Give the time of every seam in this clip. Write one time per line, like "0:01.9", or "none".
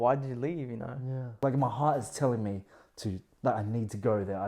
0:01.4